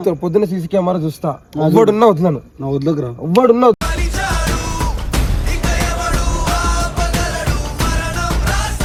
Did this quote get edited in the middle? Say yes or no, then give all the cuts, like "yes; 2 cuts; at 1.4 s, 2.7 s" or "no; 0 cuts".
no; 0 cuts